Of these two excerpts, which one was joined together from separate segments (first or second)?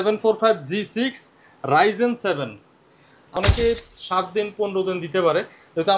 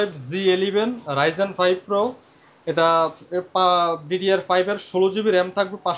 first